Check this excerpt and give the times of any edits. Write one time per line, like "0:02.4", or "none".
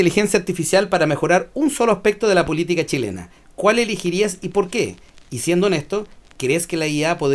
none